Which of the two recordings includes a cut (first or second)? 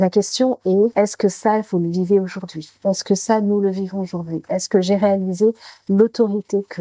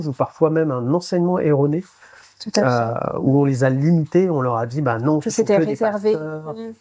first